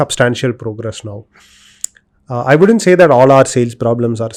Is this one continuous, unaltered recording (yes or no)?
yes